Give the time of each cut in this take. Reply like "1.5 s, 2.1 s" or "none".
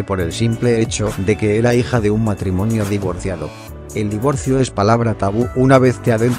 2.5 s